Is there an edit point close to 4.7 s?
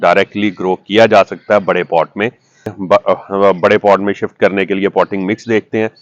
no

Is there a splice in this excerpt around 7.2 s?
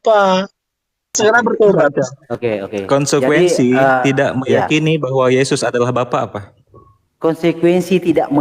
no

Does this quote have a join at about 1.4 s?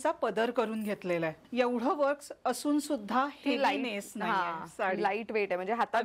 yes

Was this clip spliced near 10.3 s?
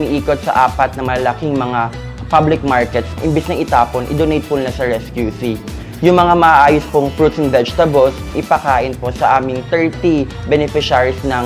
no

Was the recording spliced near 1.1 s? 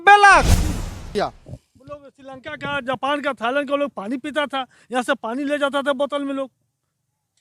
yes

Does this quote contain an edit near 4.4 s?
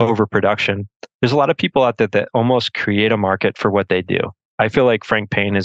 yes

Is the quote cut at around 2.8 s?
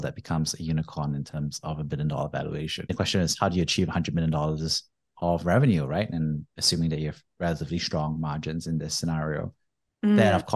yes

